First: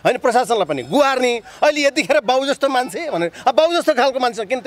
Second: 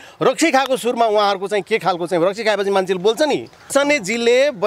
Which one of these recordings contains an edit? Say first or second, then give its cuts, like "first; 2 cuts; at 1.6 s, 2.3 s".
second; 1 cut; at 3.7 s